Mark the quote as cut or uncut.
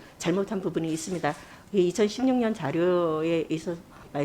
uncut